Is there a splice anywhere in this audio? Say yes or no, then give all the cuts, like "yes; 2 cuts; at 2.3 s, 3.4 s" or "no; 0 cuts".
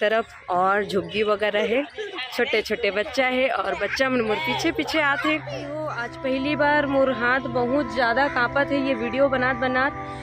yes; 1 cut; at 6.1 s